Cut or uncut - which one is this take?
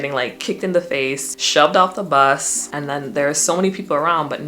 cut